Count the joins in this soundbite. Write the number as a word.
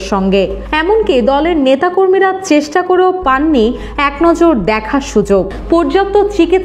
one